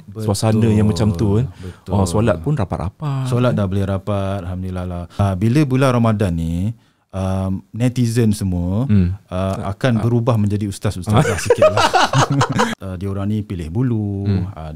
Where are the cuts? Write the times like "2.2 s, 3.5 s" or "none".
5.2 s, 12.7 s